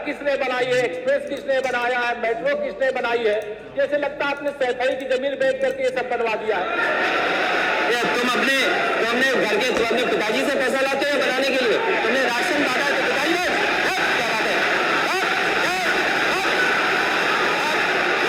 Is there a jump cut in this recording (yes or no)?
no